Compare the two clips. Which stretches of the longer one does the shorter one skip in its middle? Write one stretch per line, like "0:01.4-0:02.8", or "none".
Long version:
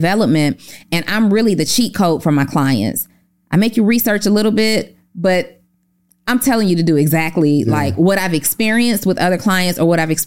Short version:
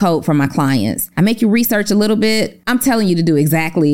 0:03.0-0:03.4
0:04.9-0:06.2